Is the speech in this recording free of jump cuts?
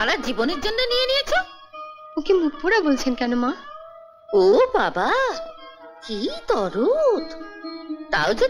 yes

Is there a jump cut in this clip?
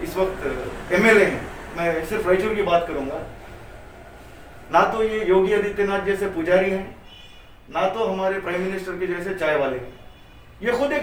no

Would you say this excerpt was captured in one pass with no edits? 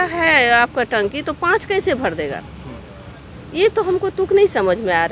yes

